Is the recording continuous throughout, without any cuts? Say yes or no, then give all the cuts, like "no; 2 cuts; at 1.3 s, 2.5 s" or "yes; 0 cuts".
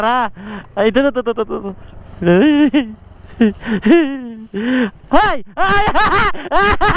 yes; 0 cuts